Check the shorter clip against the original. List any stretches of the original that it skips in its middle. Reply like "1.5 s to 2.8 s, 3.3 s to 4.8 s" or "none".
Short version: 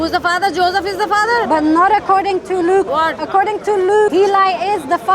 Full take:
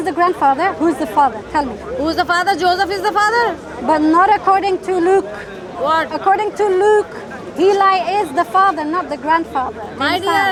3.5 s to 3.8 s, 5.3 s to 5.8 s, 7.0 s to 7.6 s